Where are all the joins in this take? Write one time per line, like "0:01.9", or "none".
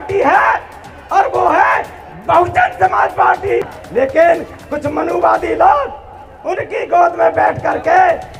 0:03.8